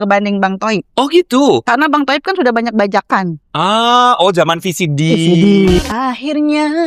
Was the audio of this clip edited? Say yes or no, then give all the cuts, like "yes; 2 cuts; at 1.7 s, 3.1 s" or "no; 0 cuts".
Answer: yes; 1 cut; at 5.8 s